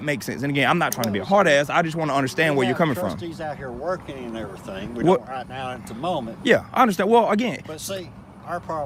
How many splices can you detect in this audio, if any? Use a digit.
0